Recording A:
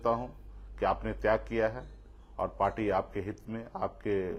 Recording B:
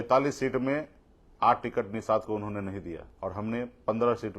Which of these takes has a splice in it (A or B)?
B